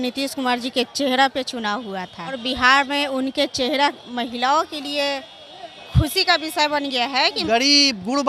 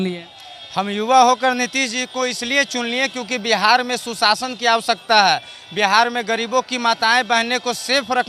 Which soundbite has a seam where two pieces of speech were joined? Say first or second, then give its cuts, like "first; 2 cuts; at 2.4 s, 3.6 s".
first; 3 cuts; at 2.4 s, 4.0 s, 7.4 s